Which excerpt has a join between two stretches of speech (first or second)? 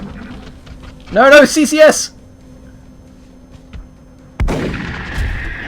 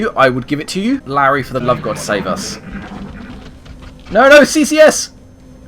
second